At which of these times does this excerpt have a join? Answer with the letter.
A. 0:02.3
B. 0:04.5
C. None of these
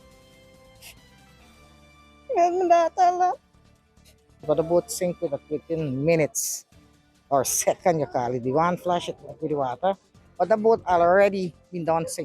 B